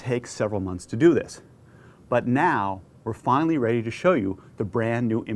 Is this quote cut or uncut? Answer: uncut